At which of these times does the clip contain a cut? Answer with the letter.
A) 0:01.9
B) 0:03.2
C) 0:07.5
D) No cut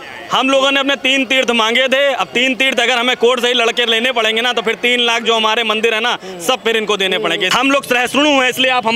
C